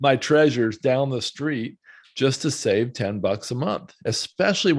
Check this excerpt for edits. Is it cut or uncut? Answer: uncut